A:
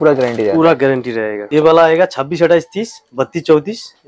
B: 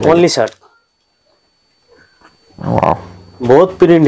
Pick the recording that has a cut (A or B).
A